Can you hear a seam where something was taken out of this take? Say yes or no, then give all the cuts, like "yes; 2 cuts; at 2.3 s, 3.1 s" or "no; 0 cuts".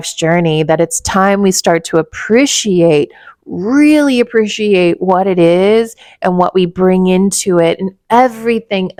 no; 0 cuts